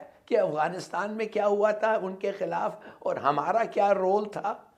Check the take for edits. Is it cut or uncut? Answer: uncut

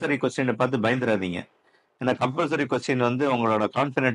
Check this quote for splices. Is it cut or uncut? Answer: uncut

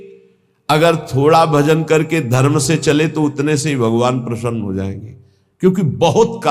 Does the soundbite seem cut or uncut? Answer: uncut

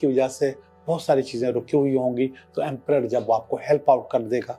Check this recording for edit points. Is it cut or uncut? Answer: uncut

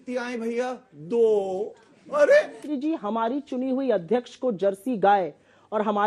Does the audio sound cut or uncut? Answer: cut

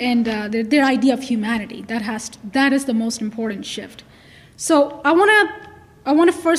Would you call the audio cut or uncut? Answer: uncut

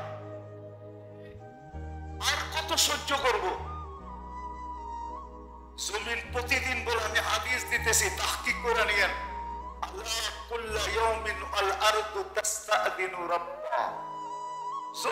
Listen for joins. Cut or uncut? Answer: cut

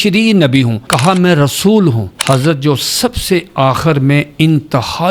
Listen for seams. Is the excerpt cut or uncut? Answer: cut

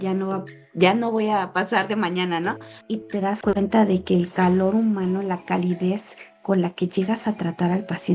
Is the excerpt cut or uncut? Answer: cut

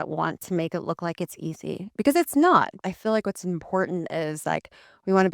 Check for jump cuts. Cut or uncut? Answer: cut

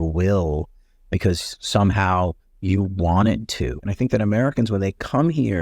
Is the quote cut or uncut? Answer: cut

